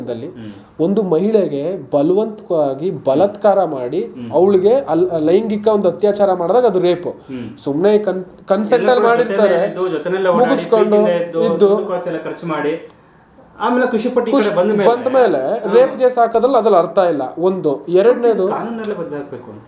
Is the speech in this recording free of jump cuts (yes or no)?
yes